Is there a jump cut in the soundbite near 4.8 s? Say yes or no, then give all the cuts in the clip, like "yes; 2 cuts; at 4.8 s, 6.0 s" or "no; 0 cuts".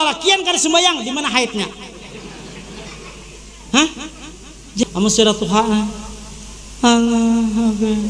yes; 1 cut; at 4.8 s